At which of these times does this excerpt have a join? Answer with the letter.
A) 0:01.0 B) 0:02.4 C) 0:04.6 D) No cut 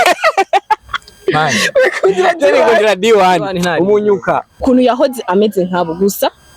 C